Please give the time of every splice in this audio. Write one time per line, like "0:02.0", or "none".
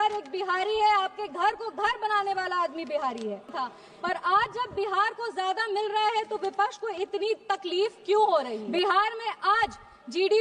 0:03.5
0:08.6